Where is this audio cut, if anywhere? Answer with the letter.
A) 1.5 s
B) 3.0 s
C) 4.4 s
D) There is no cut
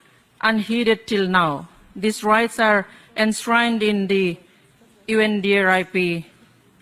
D